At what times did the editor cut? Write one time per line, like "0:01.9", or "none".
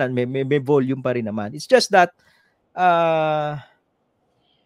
none